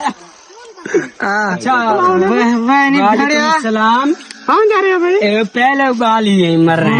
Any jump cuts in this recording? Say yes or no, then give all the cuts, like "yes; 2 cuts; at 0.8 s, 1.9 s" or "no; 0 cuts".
no; 0 cuts